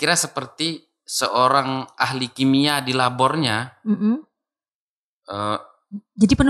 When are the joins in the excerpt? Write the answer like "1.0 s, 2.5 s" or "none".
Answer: none